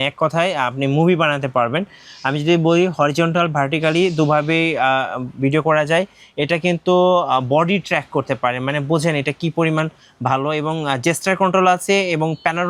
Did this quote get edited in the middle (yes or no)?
no